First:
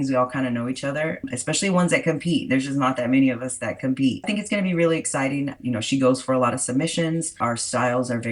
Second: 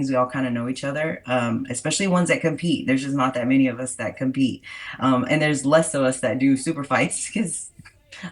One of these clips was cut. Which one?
first; 4 cuts; at 1.2 s, 4.3 s, 5.6 s, 7.4 s

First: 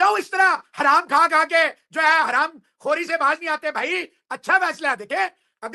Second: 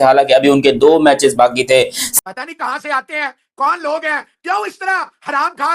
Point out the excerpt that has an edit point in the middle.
second; 1 cut; at 2.2 s

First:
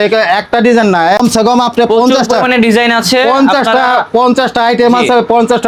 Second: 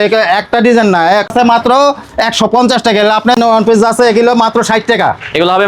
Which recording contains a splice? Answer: second; 2 cuts; at 1.3 s, 3.4 s

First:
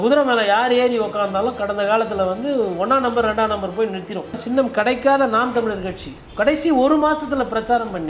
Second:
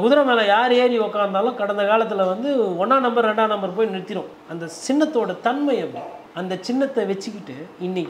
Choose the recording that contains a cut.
first; 1 cut; at 4.4 s

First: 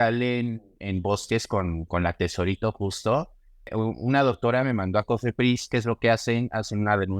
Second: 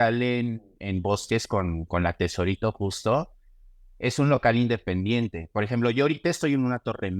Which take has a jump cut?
first; 1 cut; at 3.7 s

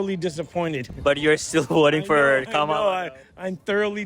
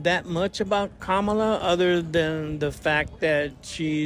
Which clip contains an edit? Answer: first; 1 cut; at 0.9 s

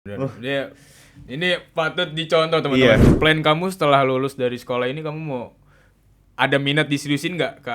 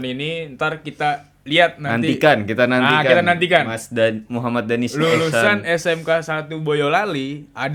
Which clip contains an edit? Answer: first; 1 cut; at 3.0 s

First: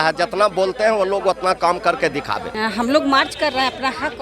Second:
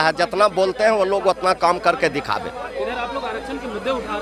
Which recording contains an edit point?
first; 1 cut; at 2.5 s

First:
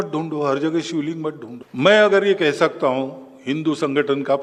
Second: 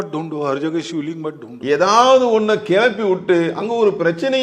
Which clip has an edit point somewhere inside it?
second; 1 cut; at 1.6 s

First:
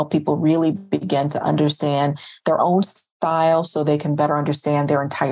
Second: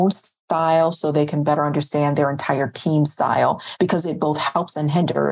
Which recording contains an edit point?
second; 1 cut; at 3.7 s

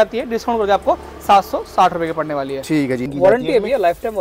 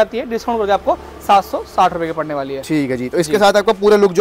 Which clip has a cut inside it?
first; 1 cut; at 3.1 s

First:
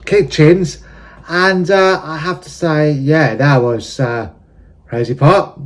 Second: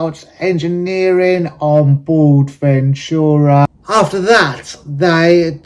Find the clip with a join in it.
second; 1 cut; at 3.7 s

